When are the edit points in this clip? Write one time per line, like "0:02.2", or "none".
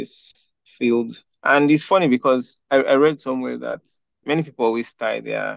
none